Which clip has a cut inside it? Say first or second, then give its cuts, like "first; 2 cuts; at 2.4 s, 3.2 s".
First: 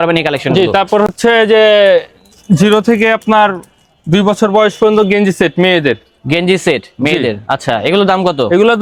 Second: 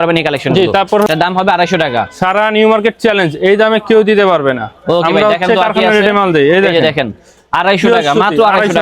second; 1 cut; at 1.1 s